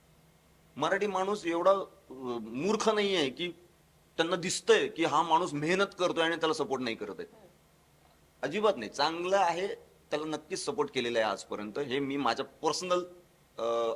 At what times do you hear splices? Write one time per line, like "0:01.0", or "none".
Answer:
none